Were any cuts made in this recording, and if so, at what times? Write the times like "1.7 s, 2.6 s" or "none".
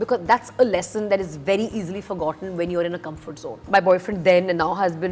3.6 s

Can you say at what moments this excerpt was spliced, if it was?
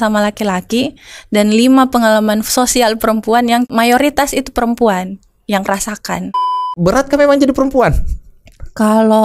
3.7 s, 6.4 s

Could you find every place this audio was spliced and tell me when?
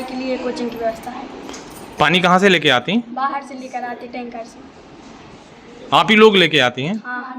none

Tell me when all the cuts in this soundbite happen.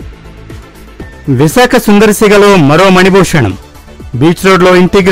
1.2 s

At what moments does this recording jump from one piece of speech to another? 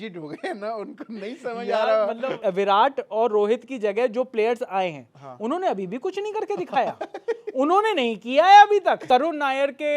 2.3 s, 9.0 s

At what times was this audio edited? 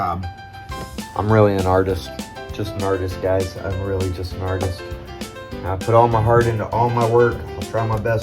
4.2 s

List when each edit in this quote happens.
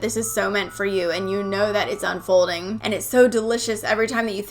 2.7 s

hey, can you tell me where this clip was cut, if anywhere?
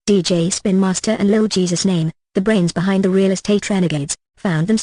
none

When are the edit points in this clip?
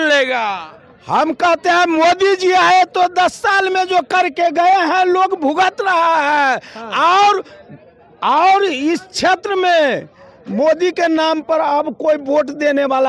none

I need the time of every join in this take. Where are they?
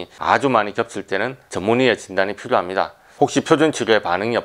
3.0 s

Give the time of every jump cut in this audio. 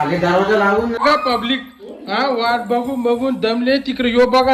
1.0 s

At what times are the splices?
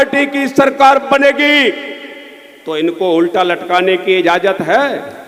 none

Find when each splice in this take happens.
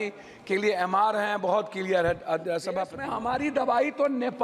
3.0 s

